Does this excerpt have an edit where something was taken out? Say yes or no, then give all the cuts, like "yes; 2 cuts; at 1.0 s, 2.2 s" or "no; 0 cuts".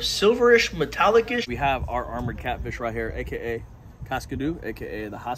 yes; 1 cut; at 1.5 s